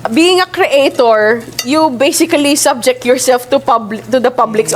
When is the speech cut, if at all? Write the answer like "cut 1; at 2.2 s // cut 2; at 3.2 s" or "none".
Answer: none